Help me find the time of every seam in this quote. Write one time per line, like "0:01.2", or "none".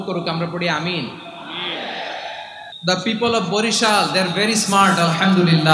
0:02.7